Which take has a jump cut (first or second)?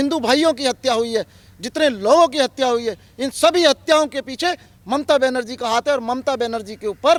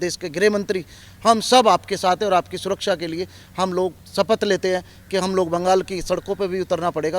second